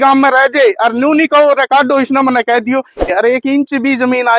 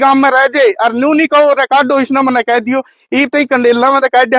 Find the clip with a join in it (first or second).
first